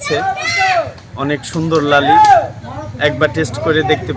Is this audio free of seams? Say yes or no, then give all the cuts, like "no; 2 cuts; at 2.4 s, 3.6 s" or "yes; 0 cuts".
yes; 0 cuts